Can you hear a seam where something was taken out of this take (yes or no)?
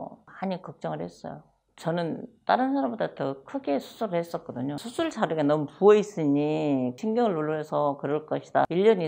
yes